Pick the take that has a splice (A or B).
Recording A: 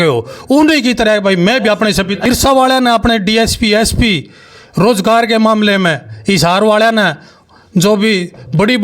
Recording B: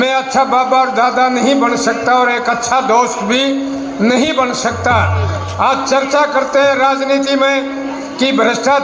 A